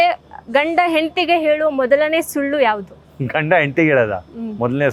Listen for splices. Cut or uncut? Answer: uncut